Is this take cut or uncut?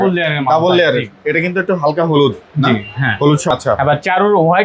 cut